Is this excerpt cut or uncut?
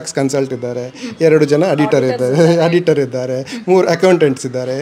uncut